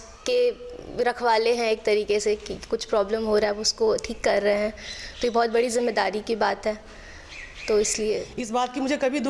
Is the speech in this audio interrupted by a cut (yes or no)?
yes